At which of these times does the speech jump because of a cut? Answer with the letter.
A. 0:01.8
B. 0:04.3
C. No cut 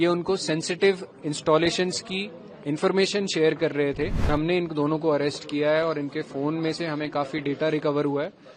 B